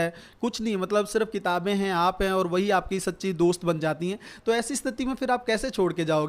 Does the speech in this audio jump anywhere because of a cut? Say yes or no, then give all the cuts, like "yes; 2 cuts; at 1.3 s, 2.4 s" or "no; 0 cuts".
no; 0 cuts